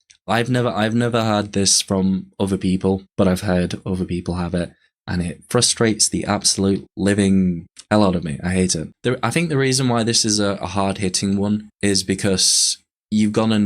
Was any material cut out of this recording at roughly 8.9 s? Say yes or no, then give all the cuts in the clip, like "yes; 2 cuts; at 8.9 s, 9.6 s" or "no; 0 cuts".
yes; 1 cut; at 8.9 s